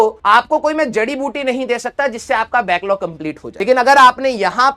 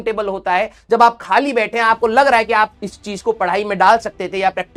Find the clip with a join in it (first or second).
first